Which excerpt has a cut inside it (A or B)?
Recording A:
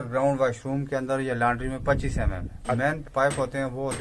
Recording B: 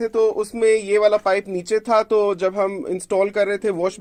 A